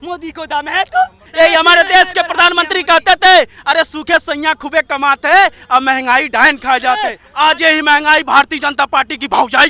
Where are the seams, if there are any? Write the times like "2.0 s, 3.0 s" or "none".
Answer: 1.2 s, 7.2 s